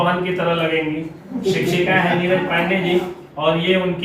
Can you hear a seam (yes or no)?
no